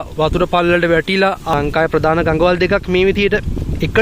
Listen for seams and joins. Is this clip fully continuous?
no; 1 cut; at 1.5 s

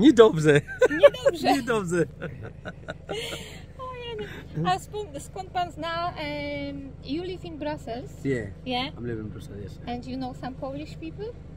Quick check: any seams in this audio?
no; 0 cuts

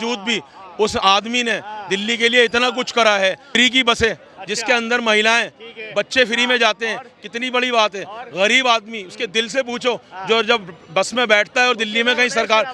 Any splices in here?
yes; 1 cut; at 3.6 s

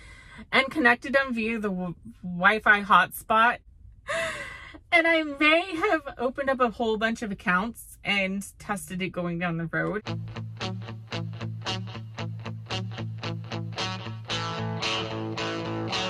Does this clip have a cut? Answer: yes; 2 cuts; at 3.6 s, 10.0 s

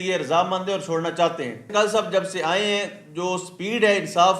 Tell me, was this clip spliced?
yes; 1 cut; at 1.7 s

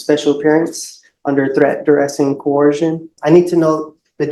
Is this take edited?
yes; 1 cut; at 3.1 s

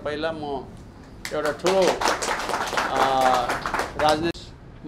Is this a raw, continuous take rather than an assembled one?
yes; 0 cuts

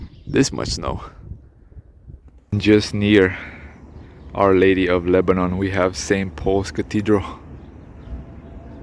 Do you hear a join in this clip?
yes; 1 cut; at 2.5 s

